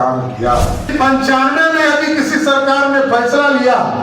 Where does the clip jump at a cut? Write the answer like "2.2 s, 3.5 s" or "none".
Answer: 0.9 s

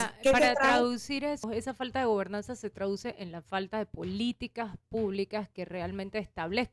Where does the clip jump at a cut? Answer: 1.4 s

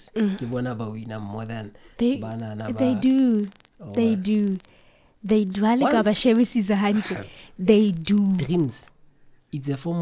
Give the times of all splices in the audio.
8.4 s

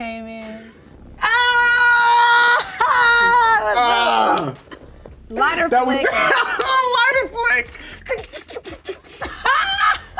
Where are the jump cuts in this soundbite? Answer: 4.5 s

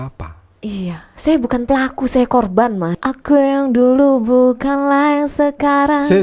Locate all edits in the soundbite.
3.0 s

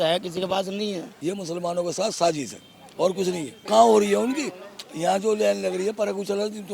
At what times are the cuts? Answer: 1.1 s, 3.5 s

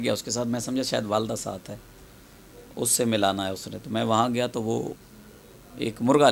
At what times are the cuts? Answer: none

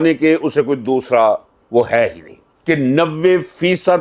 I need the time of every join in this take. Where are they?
2.5 s

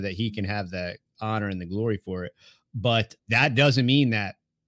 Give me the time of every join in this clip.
3.1 s

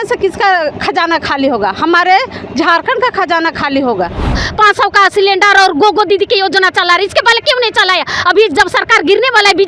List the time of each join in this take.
4.4 s

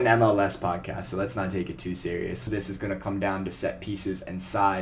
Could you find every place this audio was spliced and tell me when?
2.5 s

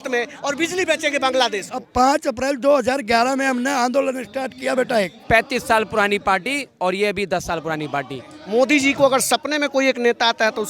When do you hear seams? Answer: 1.9 s, 5.2 s, 8.3 s

